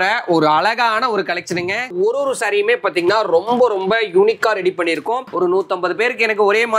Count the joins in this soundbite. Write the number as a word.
two